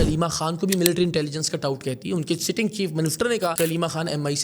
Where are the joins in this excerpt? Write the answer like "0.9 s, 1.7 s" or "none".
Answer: 3.5 s

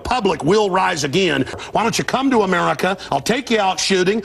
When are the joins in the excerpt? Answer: 1.5 s

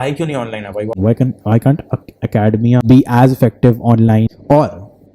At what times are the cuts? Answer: 1.0 s, 2.8 s, 4.3 s

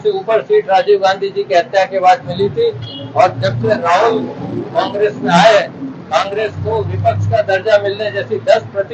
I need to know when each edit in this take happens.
none

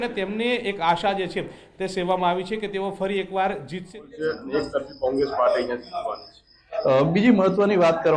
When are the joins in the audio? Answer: 4.2 s

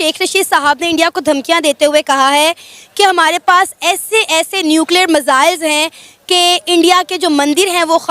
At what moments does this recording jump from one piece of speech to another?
none

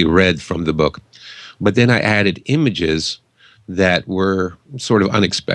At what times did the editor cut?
2.3 s

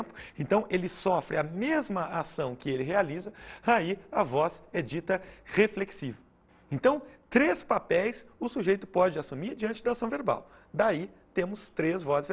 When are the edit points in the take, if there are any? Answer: 7.4 s

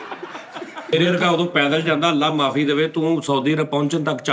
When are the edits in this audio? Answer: 0.9 s

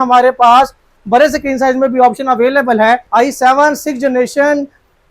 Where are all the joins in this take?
3.1 s

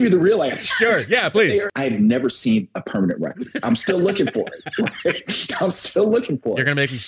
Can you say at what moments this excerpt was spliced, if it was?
1.7 s

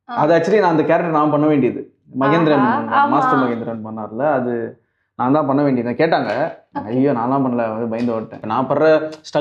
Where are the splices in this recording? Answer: 8.4 s

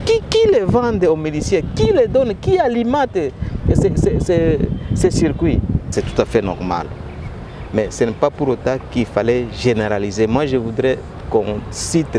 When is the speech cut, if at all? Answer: 5.8 s

